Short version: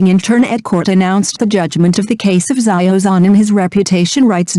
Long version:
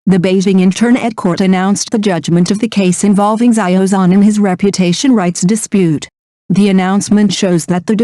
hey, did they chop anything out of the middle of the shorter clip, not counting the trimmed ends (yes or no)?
yes